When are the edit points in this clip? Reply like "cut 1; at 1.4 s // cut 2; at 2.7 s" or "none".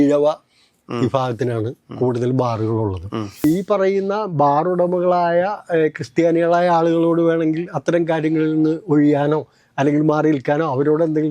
cut 1; at 3.4 s

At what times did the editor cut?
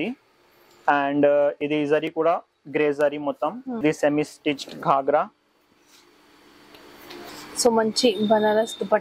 cut 1; at 3.8 s // cut 2; at 7.3 s

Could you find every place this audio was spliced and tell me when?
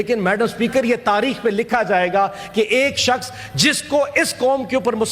none

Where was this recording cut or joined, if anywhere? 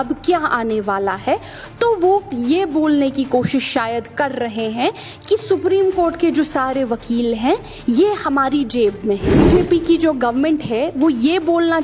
cut 1; at 9.2 s

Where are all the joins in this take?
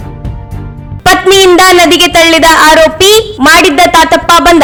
none

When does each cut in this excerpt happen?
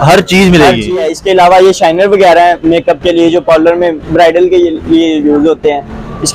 cut 1; at 1.0 s

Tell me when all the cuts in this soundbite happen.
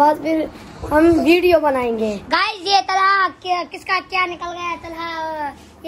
cut 1; at 2.5 s

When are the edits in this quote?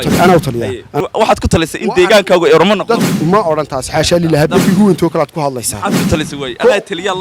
cut 1; at 0.9 s // cut 2; at 3.2 s // cut 3; at 4.6 s

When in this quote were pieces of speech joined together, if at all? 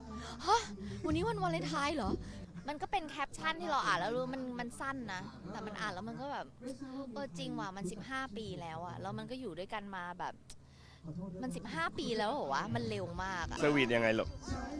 cut 1; at 2.3 s // cut 2; at 13.5 s

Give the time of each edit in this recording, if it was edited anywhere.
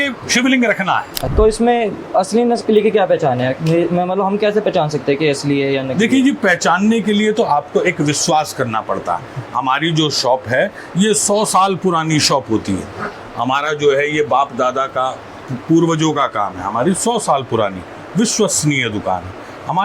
cut 1; at 1.2 s

